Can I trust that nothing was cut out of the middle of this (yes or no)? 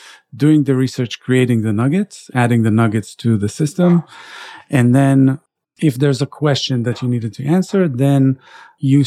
yes